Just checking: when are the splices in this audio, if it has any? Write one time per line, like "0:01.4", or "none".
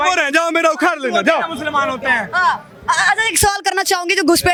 none